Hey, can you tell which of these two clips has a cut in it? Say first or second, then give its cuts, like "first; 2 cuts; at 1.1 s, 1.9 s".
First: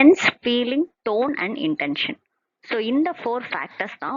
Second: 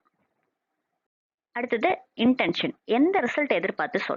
first; 1 cut; at 1.6 s